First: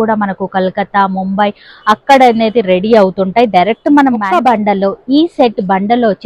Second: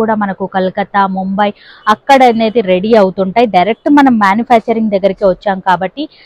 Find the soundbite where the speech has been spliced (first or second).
first